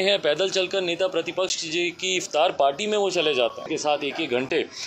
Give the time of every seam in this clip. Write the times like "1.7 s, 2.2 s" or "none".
3.7 s